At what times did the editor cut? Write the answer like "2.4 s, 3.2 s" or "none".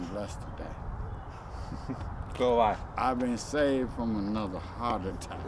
none